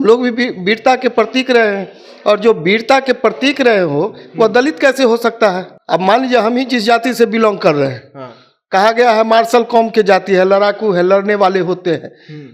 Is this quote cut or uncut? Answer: cut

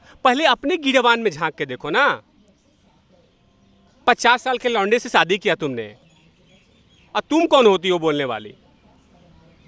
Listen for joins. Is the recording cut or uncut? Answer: cut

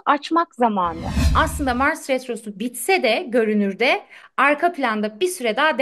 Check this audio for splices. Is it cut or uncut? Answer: cut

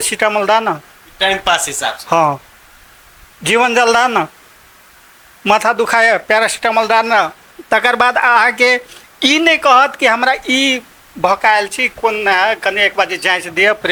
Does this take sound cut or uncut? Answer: uncut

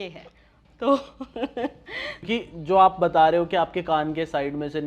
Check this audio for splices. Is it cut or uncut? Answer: cut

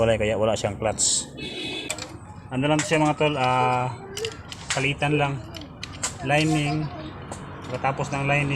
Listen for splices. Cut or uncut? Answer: cut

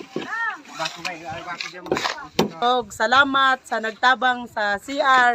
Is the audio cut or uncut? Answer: cut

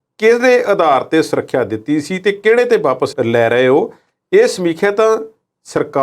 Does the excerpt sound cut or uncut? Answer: uncut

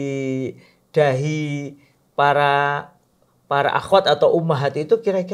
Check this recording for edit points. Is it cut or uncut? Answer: uncut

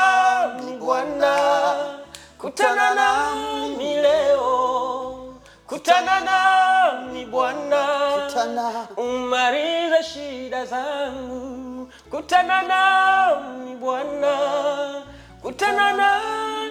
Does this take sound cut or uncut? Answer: uncut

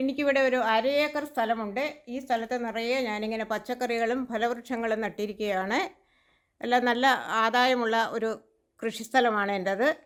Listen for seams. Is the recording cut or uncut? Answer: uncut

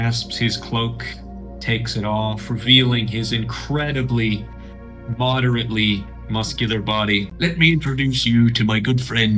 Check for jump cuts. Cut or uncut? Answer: cut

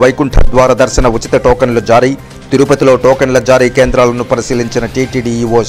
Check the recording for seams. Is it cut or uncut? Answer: uncut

